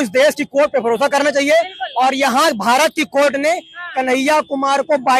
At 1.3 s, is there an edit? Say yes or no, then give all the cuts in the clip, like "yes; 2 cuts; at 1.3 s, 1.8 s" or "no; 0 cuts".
no; 0 cuts